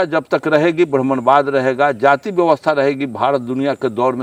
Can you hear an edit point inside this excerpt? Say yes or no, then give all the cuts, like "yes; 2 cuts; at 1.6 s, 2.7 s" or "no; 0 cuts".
no; 0 cuts